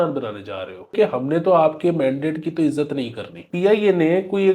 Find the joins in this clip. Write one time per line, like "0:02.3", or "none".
0:00.9
0:03.4